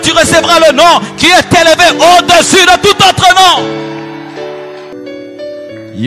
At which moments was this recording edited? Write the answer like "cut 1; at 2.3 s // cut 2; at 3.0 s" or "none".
cut 1; at 4.9 s